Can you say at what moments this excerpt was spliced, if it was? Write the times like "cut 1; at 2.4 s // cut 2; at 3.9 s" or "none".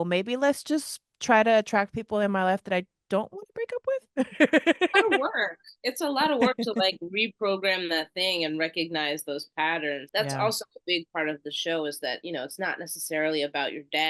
cut 1; at 10.0 s

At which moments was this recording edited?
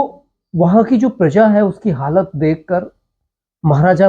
none

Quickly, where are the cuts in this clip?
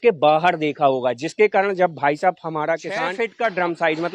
cut 1; at 3.2 s

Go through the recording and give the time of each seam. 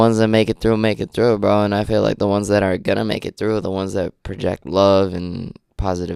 none

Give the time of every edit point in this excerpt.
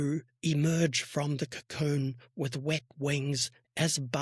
none

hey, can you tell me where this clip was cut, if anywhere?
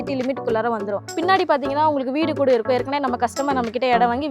cut 1; at 1.1 s

